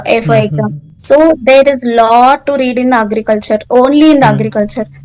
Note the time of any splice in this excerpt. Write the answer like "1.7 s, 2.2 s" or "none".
none